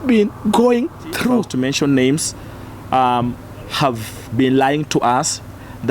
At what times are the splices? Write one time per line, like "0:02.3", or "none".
0:01.5